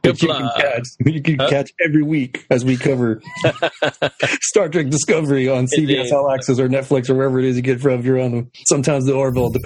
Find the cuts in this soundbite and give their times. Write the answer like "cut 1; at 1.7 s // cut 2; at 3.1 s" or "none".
cut 1; at 8.5 s